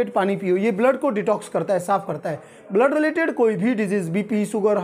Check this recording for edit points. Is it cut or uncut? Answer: uncut